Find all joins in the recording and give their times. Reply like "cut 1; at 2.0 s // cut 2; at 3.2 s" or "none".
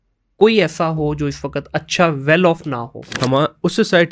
cut 1; at 3.1 s